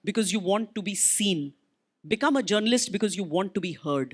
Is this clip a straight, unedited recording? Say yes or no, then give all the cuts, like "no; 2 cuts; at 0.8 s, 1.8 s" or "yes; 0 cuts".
yes; 0 cuts